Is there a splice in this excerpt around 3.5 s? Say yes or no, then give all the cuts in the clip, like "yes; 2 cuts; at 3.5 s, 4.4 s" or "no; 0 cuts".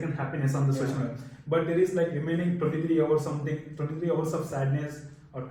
no; 0 cuts